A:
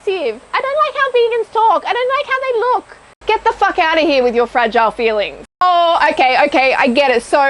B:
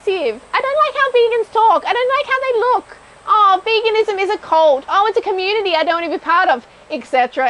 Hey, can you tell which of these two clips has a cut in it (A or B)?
A